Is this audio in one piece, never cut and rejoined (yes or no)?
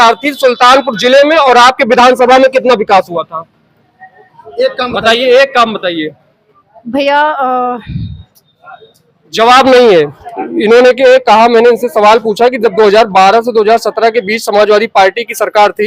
yes